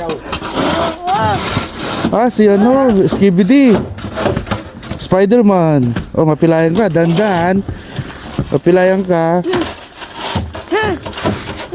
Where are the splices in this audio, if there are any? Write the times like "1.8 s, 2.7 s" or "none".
9.4 s